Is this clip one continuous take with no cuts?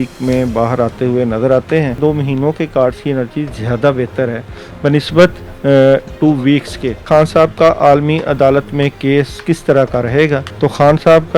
no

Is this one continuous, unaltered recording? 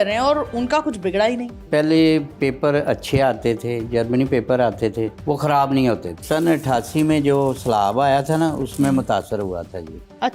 no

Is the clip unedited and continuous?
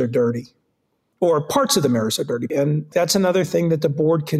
no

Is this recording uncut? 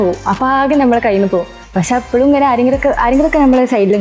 yes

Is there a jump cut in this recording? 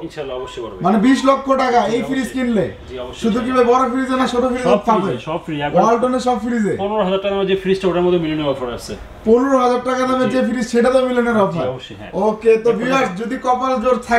no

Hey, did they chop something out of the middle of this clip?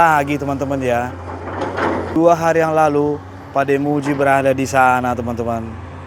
yes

